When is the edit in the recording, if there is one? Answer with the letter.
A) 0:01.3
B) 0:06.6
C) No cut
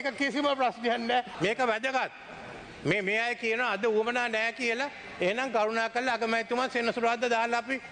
A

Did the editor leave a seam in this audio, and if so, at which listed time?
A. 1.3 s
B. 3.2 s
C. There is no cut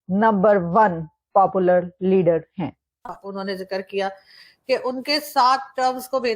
B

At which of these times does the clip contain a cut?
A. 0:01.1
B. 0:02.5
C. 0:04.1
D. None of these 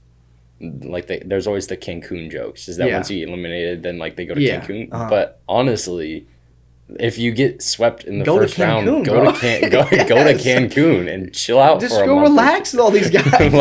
D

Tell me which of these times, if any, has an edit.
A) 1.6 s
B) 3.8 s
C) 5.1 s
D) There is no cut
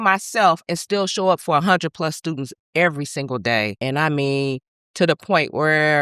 B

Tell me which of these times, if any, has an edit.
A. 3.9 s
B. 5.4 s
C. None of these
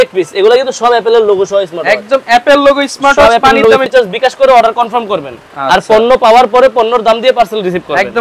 A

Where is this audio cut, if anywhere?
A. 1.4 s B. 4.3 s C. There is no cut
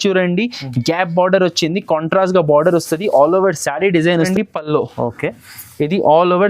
B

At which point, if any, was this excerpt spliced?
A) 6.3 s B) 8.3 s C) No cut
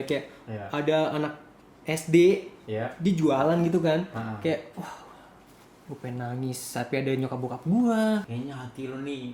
B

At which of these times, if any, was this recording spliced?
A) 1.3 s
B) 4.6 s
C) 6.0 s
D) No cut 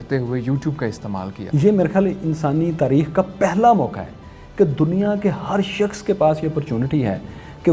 A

